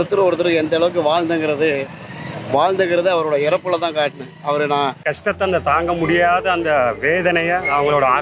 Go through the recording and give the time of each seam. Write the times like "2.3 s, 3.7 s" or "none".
5.0 s